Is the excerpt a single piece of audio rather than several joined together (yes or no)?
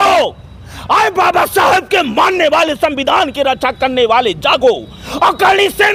yes